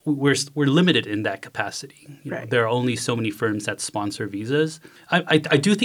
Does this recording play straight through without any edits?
no; 1 cut; at 4.9 s

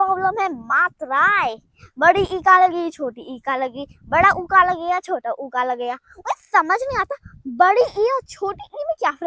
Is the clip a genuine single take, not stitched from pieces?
yes; 0 cuts

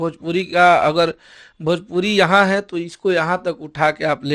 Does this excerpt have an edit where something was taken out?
no; 0 cuts

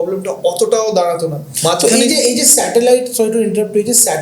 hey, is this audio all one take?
yes; 0 cuts

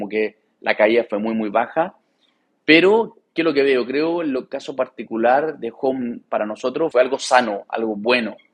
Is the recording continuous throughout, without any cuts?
yes; 0 cuts

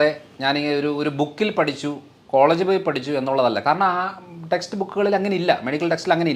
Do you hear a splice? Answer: no; 0 cuts

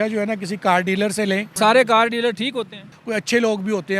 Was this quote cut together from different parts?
yes; 2 cuts; at 1.5 s, 3.0 s

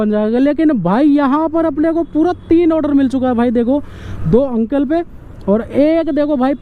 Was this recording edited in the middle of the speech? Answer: no; 0 cuts

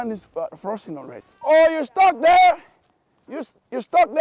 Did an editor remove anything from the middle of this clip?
yes; 1 cut; at 1.2 s

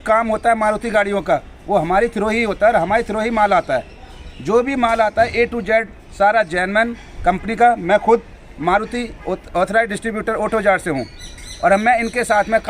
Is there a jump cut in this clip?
no; 0 cuts

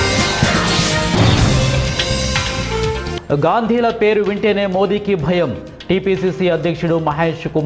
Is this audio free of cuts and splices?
yes; 0 cuts

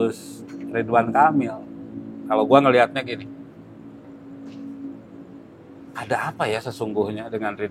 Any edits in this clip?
no; 0 cuts

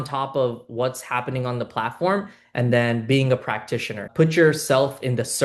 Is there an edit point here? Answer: yes; 1 cut; at 4.0 s

